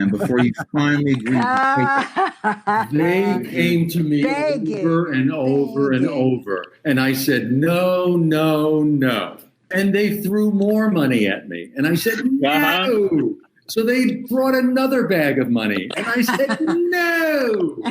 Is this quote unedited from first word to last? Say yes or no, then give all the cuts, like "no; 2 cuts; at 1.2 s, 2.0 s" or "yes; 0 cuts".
no; 1 cut; at 9.6 s